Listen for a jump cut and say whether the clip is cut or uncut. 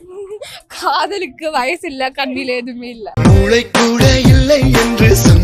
uncut